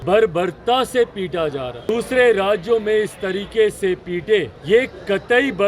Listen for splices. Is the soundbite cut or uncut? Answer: cut